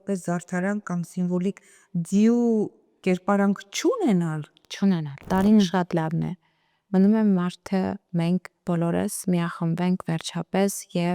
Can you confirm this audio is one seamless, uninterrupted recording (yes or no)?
no